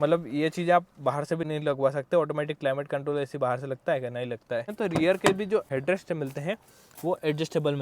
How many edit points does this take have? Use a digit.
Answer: 1